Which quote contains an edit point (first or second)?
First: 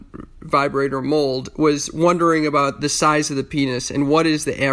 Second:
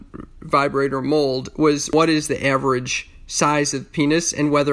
second